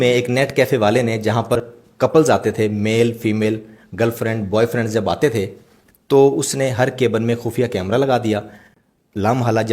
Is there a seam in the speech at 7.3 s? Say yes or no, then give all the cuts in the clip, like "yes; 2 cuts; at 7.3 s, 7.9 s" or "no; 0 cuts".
no; 1 cut; at 1.6 s